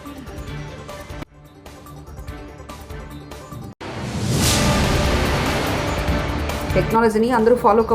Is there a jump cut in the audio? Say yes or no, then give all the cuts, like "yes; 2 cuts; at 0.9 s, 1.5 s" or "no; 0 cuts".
no; 0 cuts